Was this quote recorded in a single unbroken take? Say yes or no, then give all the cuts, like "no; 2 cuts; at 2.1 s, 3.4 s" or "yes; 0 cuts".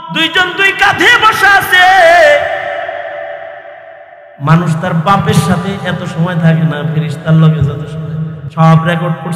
no; 1 cut; at 8.4 s